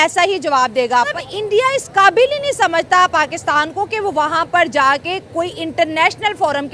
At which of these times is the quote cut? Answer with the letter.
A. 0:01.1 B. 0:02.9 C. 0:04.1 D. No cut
A